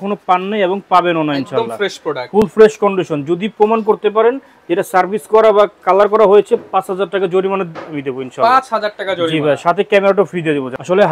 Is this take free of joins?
yes; 0 cuts

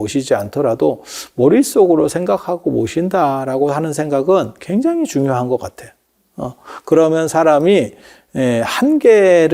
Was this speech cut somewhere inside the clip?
no; 0 cuts

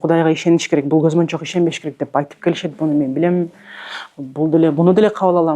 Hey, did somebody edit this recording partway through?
no; 0 cuts

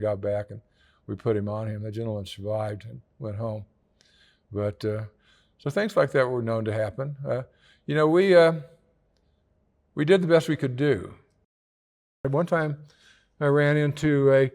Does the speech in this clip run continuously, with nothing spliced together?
no; 1 cut; at 11.9 s

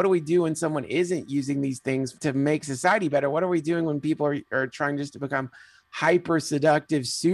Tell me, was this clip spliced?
yes; 1 cut; at 2.1 s

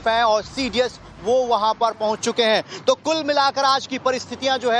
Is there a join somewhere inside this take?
yes; 1 cut; at 3.7 s

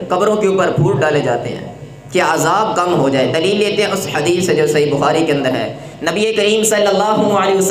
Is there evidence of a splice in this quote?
no; 0 cuts

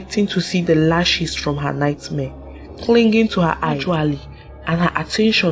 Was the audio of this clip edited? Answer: yes; 1 cut; at 3.8 s

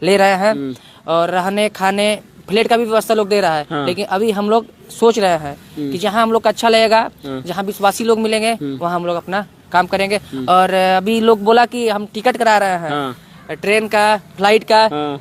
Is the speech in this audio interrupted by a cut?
no; 0 cuts

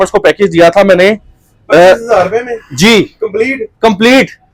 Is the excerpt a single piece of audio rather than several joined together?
yes; 0 cuts

